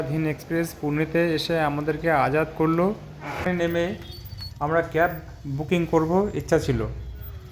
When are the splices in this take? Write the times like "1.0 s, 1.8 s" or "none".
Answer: 3.5 s